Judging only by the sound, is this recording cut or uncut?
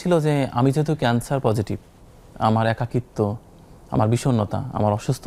uncut